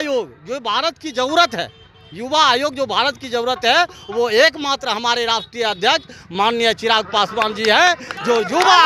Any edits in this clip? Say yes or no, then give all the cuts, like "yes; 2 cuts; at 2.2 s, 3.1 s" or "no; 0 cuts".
no; 0 cuts